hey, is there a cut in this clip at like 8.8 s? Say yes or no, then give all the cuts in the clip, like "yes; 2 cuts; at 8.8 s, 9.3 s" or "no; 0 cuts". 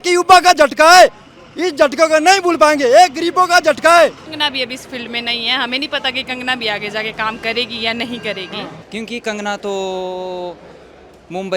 yes; 2 cuts; at 4.3 s, 8.8 s